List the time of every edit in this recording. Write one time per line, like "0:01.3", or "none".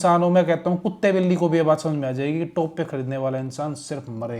none